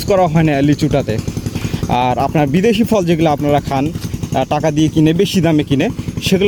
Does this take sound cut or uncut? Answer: uncut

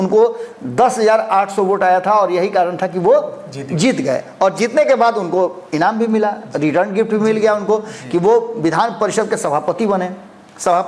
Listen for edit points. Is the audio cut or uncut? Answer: uncut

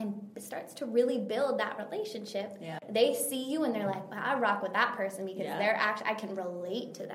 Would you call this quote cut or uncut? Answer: cut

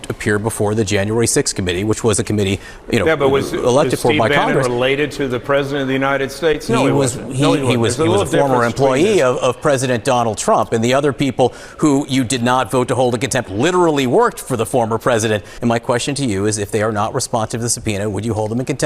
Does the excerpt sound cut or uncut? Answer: cut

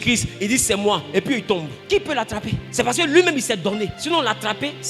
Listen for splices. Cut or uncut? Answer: cut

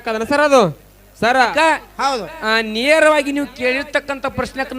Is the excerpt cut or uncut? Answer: cut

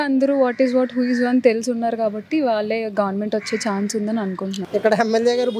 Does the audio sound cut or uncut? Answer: cut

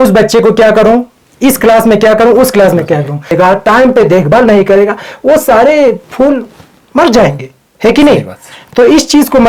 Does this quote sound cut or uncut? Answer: cut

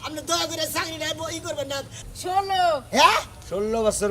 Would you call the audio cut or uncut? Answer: cut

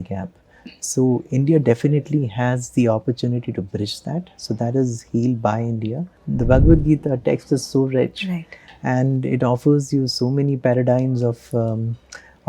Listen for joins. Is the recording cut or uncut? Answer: cut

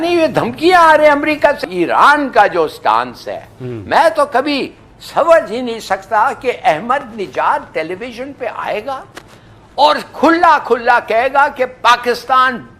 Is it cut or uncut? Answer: cut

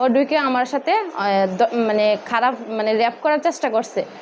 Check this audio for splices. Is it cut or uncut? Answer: uncut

